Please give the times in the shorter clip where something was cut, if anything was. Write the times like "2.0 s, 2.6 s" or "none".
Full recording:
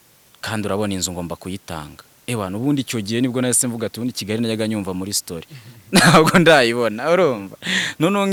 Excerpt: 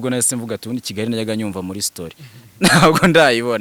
none